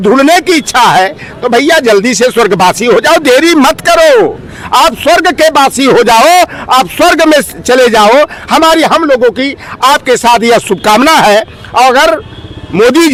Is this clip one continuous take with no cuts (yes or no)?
yes